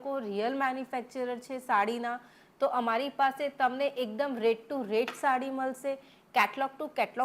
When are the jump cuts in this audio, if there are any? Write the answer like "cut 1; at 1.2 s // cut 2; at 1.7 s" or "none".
none